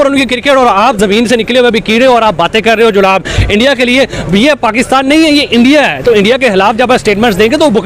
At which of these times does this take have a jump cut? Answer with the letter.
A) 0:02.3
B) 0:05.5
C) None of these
C